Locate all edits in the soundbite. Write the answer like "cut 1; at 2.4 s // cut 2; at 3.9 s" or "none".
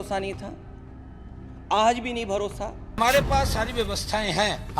cut 1; at 2.8 s